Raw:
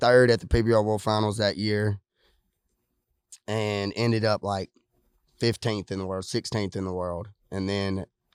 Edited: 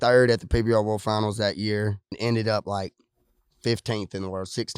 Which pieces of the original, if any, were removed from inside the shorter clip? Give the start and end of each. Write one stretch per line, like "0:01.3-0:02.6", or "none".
0:02.2-0:03.9